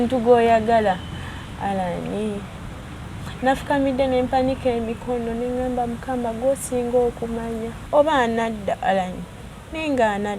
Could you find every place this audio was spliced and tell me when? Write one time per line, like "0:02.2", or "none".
0:07.8